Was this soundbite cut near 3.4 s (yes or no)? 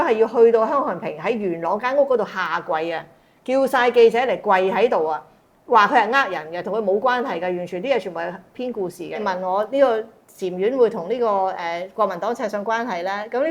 no